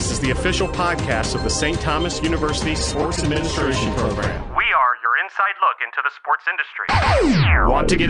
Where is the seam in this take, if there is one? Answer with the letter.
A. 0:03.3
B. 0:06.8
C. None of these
B